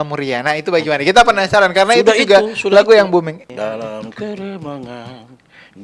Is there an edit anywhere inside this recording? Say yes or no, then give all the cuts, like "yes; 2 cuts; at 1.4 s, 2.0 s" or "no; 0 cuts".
yes; 1 cut; at 3.5 s